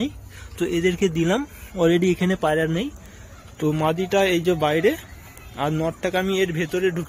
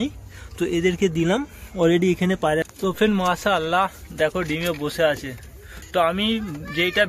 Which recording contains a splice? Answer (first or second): second